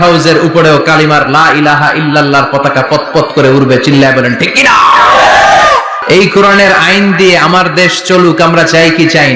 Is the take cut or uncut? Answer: cut